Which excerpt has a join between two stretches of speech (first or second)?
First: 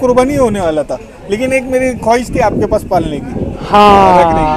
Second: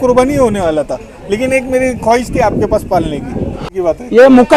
second